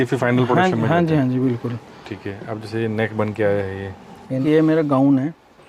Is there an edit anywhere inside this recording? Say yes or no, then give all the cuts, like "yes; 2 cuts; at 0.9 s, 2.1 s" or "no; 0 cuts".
yes; 1 cut; at 4.4 s